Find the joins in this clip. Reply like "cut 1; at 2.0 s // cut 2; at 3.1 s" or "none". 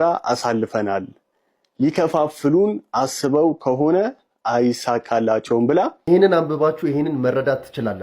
cut 1; at 6.1 s